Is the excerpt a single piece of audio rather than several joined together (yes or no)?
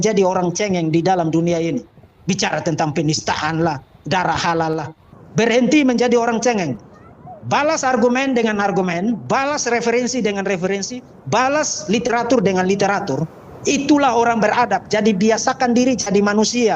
no